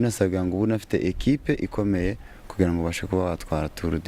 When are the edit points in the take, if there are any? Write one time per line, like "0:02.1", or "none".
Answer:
none